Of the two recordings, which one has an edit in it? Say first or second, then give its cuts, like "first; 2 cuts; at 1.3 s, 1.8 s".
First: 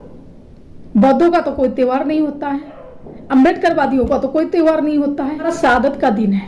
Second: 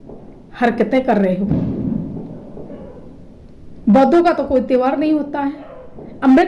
first; 1 cut; at 5.5 s